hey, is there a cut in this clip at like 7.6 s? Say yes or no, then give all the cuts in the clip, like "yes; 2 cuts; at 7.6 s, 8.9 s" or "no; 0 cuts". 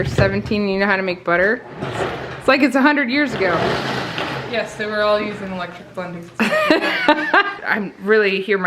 yes; 1 cut; at 7.6 s